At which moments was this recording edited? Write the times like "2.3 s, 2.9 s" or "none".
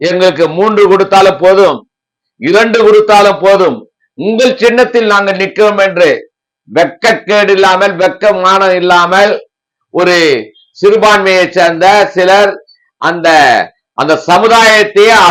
none